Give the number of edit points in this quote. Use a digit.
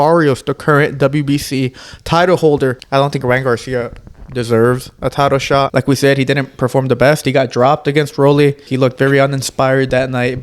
3